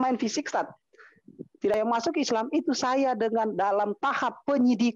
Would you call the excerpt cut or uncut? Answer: cut